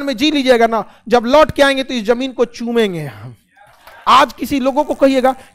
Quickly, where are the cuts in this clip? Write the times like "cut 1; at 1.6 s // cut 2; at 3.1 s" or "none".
cut 1; at 3.9 s